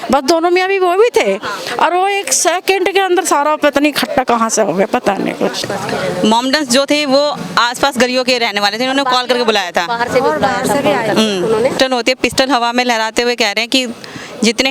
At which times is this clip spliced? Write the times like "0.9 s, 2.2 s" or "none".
5.6 s, 11.7 s